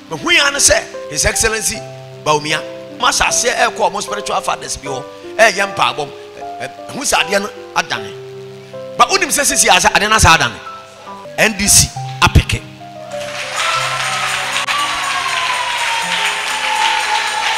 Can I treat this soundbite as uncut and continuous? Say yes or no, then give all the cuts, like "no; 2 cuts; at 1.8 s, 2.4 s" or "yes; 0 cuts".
no; 1 cut; at 11.2 s